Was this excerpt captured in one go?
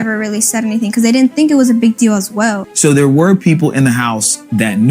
no; 1 cut; at 2.7 s

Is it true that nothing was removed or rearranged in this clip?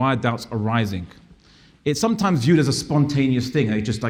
yes; 0 cuts

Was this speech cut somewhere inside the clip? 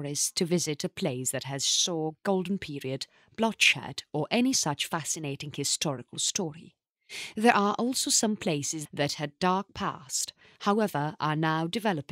no; 0 cuts

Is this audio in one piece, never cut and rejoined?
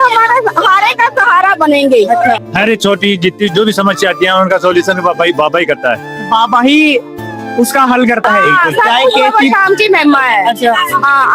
no; 2 cuts; at 2.5 s, 8.3 s

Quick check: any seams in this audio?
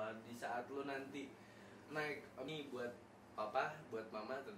yes; 1 cut; at 2.5 s

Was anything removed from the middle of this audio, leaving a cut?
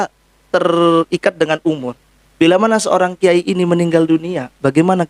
no; 0 cuts

